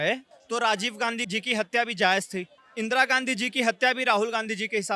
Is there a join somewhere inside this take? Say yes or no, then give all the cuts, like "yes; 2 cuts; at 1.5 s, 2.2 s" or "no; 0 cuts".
yes; 1 cut; at 2.5 s